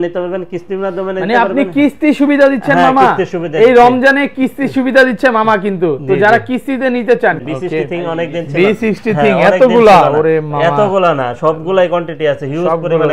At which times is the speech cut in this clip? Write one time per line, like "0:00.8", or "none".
0:07.4